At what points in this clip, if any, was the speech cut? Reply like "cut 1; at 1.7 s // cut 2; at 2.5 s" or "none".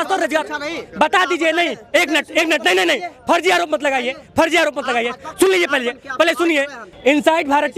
cut 1; at 6.8 s